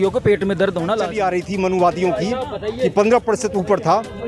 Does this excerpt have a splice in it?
yes; 1 cut; at 1.1 s

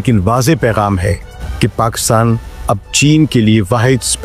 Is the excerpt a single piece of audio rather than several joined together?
yes; 0 cuts

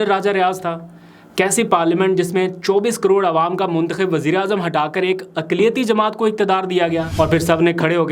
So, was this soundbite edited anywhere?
yes; 1 cut; at 7.1 s

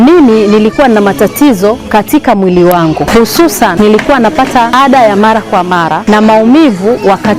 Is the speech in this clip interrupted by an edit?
yes; 3 cuts; at 3.7 s, 4.7 s, 6.0 s

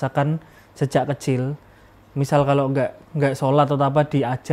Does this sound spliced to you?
no; 0 cuts

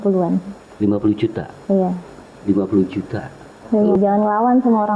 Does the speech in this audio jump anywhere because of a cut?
yes; 1 cut; at 4.0 s

